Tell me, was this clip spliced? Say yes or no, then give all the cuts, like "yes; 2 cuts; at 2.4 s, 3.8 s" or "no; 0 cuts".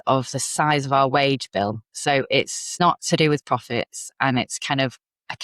yes; 1 cut; at 2.8 s